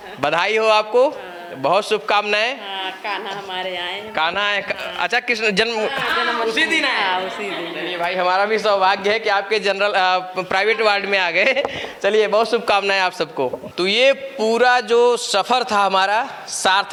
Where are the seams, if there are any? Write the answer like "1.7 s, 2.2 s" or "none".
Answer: none